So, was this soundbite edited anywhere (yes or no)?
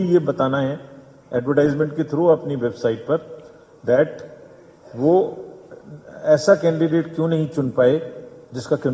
no